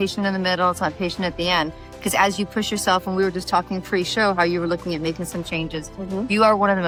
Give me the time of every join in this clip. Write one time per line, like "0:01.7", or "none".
none

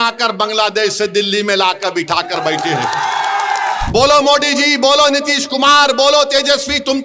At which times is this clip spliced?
0:03.8

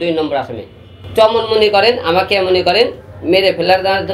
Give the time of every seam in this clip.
none

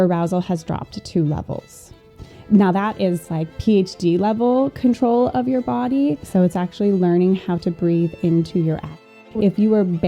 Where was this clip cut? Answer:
0:06.2
0:09.1

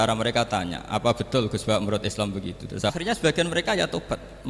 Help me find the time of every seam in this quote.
0:02.9

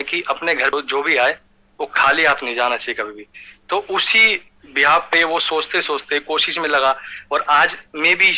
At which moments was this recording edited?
none

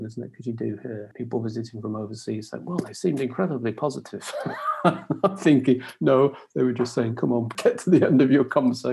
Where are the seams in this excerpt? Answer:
0:01.1
0:07.5

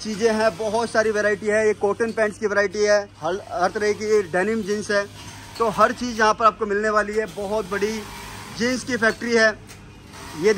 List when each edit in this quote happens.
none

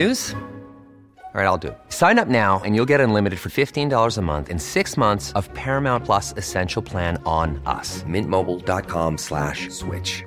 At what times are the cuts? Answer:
none

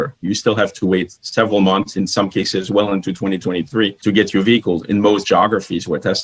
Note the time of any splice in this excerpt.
0:04.0

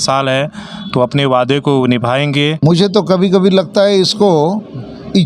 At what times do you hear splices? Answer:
0:02.6

